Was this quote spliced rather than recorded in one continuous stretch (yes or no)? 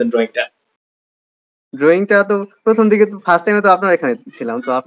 no